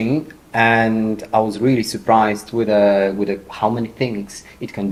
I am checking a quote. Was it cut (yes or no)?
no